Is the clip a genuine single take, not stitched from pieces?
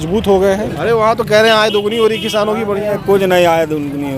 no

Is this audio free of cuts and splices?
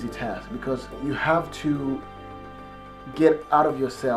no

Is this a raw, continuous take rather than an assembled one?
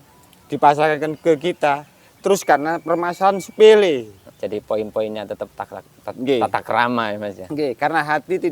no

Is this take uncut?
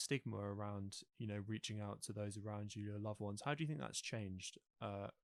yes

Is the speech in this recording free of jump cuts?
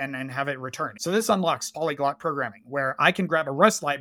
no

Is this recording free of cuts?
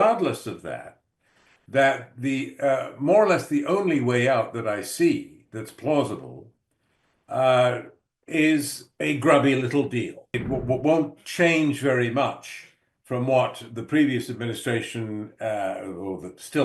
no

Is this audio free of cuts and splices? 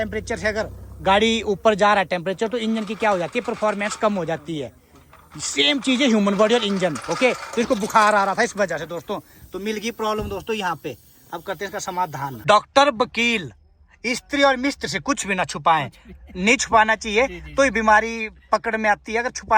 no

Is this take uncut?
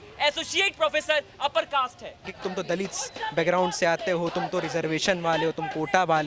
no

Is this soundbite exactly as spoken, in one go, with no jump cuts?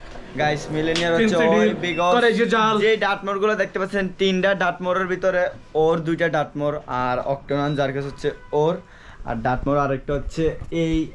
yes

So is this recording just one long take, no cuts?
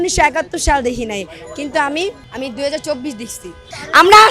no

